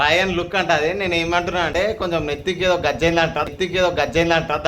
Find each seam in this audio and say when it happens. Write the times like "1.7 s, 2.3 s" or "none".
none